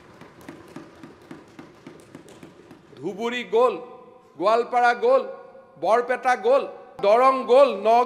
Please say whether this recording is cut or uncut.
cut